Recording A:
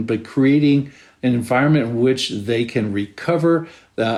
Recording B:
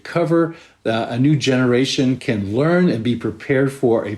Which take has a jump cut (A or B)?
B